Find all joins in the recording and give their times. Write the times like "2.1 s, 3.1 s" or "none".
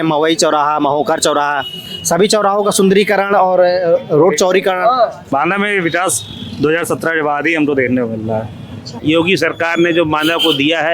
5.2 s, 9.0 s